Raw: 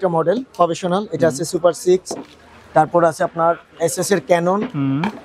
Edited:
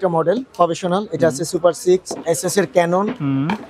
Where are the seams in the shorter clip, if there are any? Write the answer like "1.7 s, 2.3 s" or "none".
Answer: 2.1 s